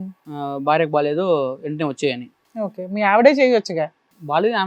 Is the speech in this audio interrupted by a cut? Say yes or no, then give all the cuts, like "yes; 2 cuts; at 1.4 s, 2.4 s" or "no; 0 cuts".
no; 0 cuts